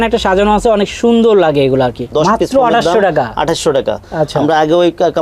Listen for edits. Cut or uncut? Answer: cut